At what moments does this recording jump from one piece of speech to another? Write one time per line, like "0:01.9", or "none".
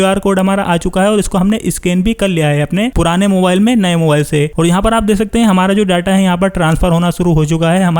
none